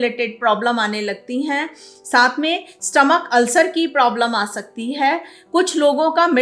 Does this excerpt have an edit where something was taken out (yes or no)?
no